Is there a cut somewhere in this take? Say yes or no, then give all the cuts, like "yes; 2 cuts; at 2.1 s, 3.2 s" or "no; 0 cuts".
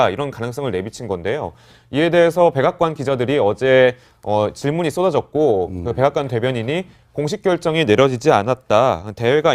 yes; 1 cut; at 2.6 s